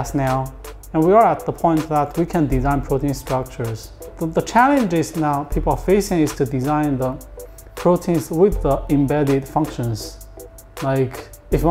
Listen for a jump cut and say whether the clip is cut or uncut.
cut